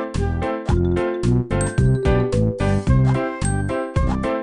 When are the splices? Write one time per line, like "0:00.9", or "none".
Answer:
none